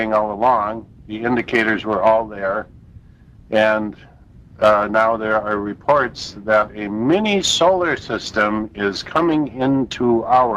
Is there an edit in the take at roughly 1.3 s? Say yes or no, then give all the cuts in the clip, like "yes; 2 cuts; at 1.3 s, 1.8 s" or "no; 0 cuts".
yes; 1 cut; at 1.3 s